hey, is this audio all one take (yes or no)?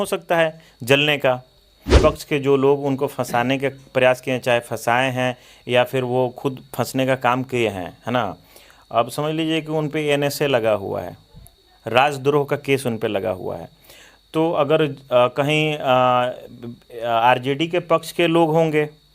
no